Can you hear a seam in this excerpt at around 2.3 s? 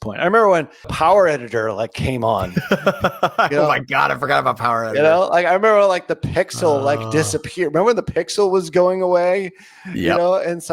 no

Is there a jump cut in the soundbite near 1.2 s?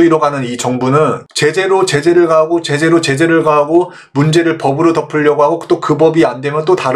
yes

